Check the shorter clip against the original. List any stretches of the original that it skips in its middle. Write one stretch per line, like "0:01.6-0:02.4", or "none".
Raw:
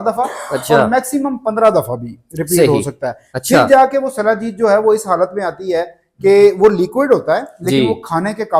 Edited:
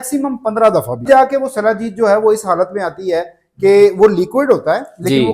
0:02.1-0:03.7